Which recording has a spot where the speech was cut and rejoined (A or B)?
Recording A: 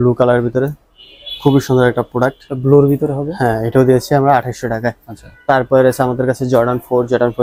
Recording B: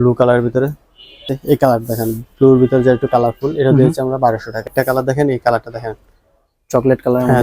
B